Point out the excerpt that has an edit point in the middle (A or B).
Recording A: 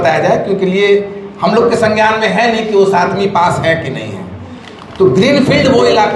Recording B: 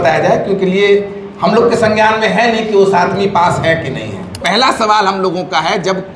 B